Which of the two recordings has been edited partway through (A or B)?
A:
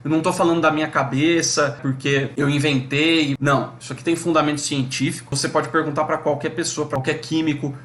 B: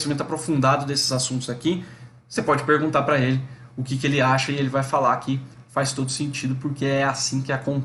A